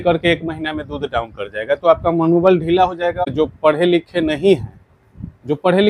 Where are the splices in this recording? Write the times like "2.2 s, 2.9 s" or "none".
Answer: 3.2 s